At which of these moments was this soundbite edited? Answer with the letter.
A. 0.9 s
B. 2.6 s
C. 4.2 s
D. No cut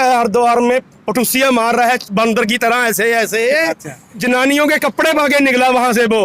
C